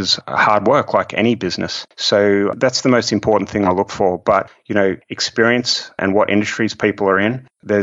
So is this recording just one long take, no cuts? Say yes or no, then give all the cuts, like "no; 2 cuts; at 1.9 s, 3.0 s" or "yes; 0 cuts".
yes; 0 cuts